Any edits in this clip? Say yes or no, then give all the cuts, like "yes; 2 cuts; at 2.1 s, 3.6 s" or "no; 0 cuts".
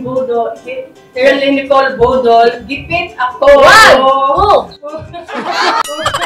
no; 0 cuts